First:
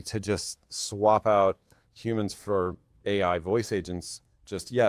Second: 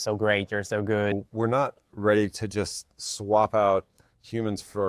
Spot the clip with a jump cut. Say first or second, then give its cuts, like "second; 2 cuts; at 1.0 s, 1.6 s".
second; 1 cut; at 1.1 s